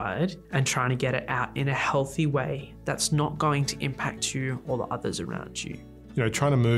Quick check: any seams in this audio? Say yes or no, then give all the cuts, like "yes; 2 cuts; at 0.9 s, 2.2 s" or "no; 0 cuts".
no; 0 cuts